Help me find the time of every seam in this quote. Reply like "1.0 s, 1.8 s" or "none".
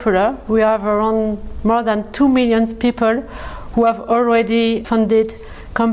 none

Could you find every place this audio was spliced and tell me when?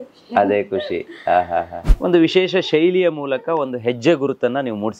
1.8 s

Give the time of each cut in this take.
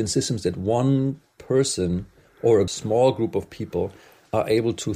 2.7 s

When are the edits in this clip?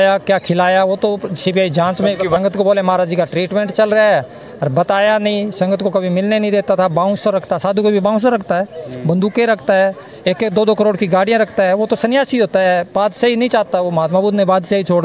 2.4 s

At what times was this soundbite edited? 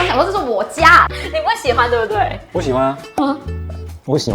1.1 s

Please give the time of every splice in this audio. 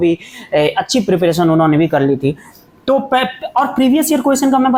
none

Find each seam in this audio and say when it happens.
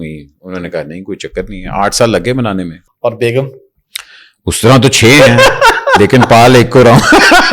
2.8 s

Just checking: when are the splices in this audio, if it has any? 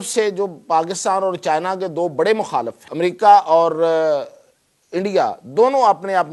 2.8 s

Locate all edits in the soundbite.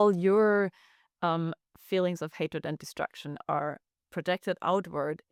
none

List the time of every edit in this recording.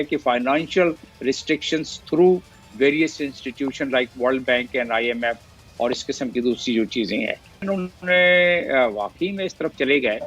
7.6 s

